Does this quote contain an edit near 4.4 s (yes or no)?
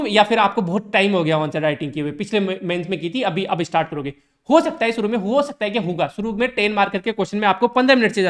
no